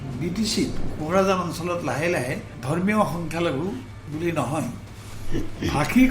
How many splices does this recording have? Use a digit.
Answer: 2